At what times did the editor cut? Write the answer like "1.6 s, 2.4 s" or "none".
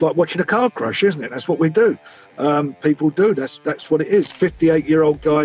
4.3 s